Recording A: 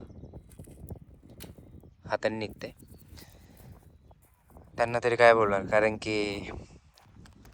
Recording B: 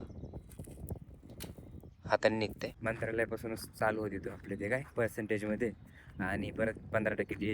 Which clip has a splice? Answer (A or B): B